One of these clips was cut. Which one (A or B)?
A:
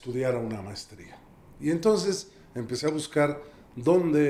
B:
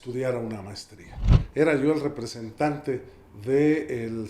B